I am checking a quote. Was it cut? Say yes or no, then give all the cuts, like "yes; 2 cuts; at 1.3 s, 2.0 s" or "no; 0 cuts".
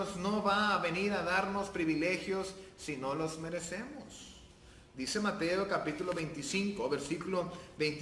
no; 0 cuts